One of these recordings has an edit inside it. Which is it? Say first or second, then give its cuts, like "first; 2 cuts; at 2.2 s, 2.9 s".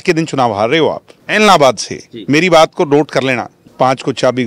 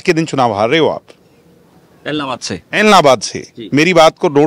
first; 2 cuts; at 1.1 s, 3.6 s